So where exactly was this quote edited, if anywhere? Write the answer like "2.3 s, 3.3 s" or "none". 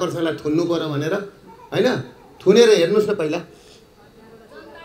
none